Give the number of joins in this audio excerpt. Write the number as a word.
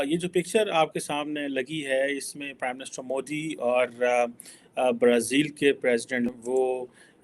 one